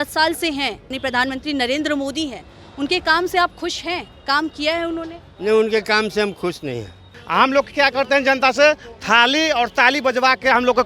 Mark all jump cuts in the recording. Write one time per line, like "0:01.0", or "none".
0:00.9
0:07.2